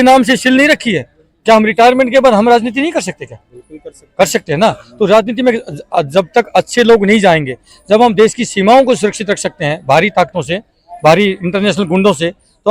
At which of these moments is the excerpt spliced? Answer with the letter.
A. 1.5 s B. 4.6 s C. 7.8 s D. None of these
D